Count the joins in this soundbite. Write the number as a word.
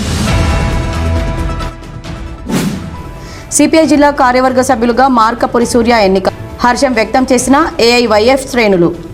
one